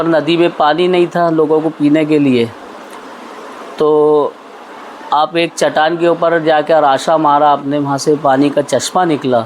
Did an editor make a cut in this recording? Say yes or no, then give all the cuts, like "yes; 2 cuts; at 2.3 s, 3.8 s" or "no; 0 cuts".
no; 0 cuts